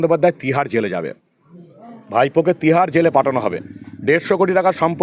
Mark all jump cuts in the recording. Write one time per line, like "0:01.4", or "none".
none